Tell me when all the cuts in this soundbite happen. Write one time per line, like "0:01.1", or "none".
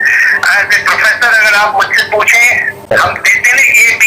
0:02.9